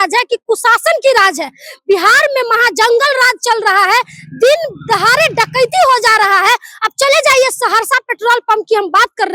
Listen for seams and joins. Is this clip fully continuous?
yes; 0 cuts

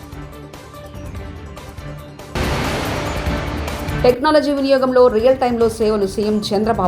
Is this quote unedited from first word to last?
no; 2 cuts; at 2.3 s, 3.9 s

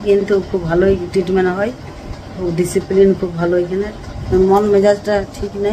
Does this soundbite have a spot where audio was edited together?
yes; 1 cut; at 4.3 s

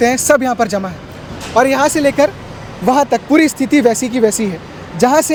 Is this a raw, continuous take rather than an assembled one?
yes; 0 cuts

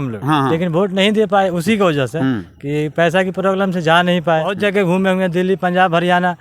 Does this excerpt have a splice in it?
yes; 1 cut; at 4.6 s

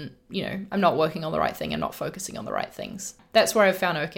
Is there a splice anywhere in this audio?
yes; 1 cut; at 3.2 s

